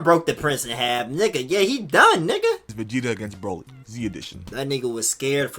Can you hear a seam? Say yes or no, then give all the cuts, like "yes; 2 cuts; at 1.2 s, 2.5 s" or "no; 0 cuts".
yes; 2 cuts; at 2.7 s, 4.5 s